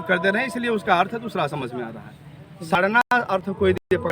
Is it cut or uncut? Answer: cut